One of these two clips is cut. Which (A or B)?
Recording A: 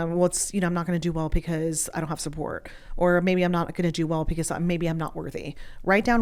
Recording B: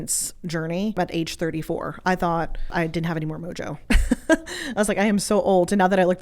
B